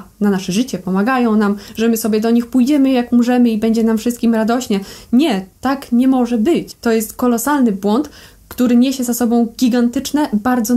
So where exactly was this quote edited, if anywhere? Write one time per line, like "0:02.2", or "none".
0:06.7

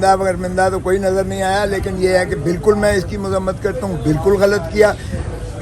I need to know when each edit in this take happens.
none

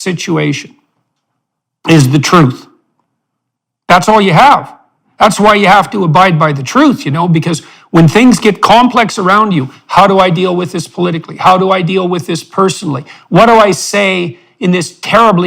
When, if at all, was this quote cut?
none

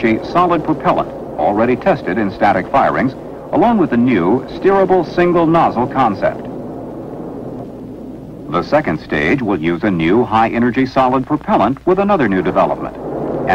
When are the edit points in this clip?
0:07.1

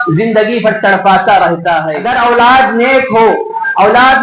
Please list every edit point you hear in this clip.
0:02.0

